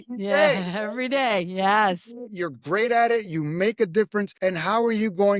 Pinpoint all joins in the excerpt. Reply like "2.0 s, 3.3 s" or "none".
4.3 s